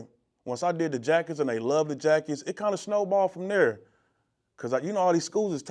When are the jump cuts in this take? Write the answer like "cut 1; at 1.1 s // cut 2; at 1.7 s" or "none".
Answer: none